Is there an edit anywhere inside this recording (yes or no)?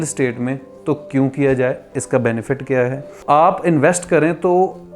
yes